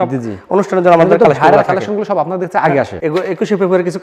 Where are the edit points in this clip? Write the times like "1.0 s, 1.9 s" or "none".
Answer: 3.0 s